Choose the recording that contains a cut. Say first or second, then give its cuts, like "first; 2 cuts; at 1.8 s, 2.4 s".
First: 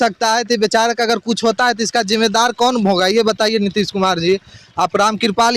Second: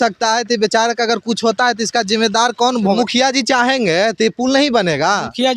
second; 1 cut; at 3.0 s